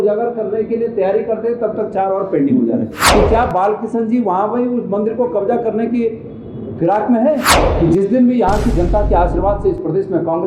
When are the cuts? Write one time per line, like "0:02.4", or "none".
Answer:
0:03.0
0:07.5